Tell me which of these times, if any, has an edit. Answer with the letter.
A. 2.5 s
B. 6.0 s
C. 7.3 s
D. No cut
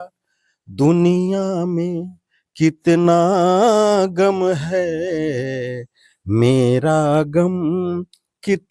D